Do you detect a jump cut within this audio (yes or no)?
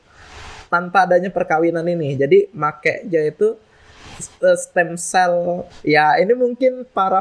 yes